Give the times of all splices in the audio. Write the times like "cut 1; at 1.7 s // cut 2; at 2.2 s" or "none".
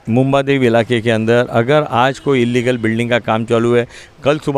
none